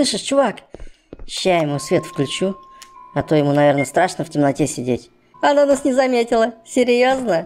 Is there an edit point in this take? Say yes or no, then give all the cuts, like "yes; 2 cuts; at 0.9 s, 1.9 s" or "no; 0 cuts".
yes; 1 cut; at 5.3 s